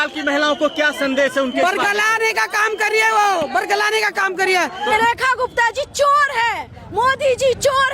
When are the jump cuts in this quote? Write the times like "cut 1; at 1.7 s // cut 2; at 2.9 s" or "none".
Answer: cut 1; at 4.9 s